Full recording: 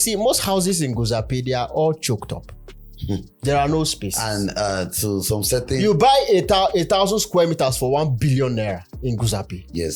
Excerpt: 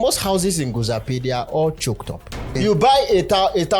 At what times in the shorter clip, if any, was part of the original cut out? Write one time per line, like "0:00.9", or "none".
0:02.5